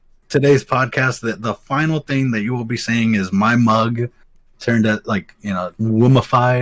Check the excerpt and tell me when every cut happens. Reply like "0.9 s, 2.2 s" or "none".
5.7 s